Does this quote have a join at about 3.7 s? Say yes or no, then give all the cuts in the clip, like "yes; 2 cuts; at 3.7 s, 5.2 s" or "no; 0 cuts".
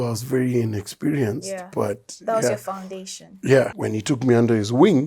yes; 1 cut; at 3.7 s